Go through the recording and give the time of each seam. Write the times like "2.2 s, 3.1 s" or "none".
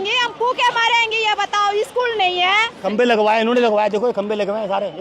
2.8 s